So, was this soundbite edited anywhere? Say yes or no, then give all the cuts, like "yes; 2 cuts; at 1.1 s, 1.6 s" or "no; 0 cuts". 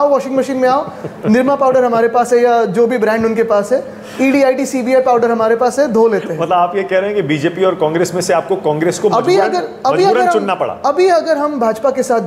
no; 0 cuts